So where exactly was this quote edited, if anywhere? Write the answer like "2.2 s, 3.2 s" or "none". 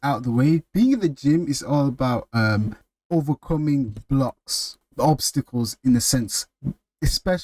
2.9 s, 4.8 s